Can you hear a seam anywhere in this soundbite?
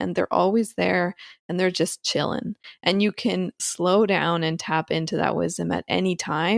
no; 0 cuts

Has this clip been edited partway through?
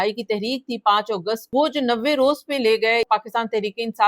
yes; 2 cuts; at 1.4 s, 3.1 s

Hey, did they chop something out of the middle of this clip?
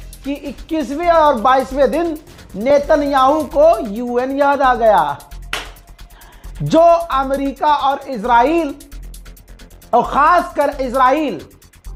no; 0 cuts

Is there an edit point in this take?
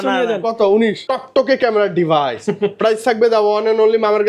yes; 1 cut; at 1.0 s

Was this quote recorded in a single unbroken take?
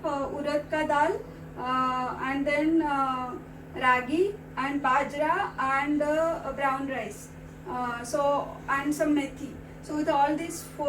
yes; 0 cuts

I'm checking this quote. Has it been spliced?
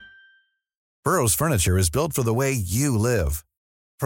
yes; 1 cut; at 0.9 s

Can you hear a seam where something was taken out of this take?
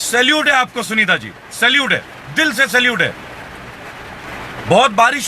no; 0 cuts

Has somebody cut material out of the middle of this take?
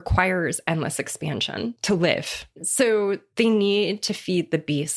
yes; 2 cuts; at 1.8 s, 2.6 s

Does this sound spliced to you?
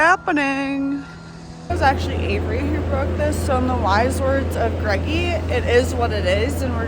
yes; 1 cut; at 1.7 s

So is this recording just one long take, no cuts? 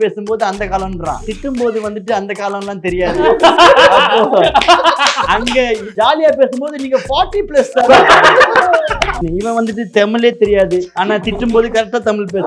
no; 3 cuts; at 1.3 s, 5.9 s, 9.1 s

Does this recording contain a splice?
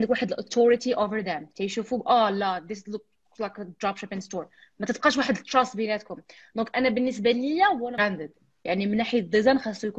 yes; 1 cut; at 8.0 s

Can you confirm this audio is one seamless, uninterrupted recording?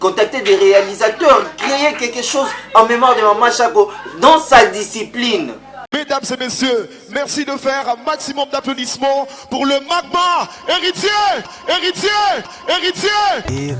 no; 1 cut; at 5.8 s

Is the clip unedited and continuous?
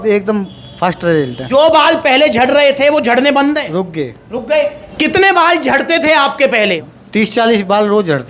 no; 2 cuts; at 1.4 s, 6.8 s

